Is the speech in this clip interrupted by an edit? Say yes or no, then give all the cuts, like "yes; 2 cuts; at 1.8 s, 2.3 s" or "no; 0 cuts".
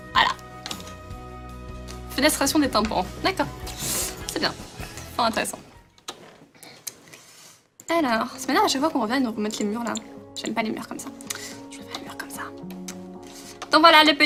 no; 0 cuts